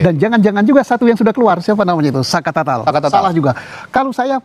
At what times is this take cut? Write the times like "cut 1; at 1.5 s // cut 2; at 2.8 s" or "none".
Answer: none